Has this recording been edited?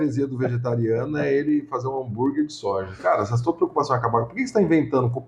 no; 0 cuts

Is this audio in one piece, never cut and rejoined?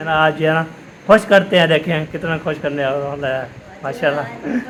yes; 0 cuts

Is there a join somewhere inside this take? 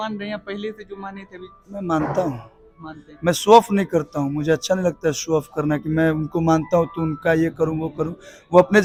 no; 0 cuts

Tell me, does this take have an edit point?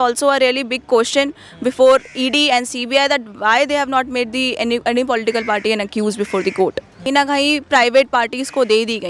yes; 1 cut; at 7.0 s

